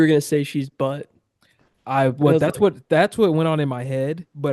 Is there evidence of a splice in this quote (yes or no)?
no